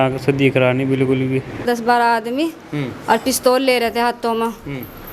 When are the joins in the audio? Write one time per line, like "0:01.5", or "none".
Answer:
0:01.6